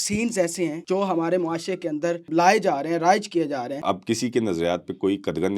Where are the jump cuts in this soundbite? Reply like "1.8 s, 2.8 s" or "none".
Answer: 0.8 s, 2.3 s, 3.7 s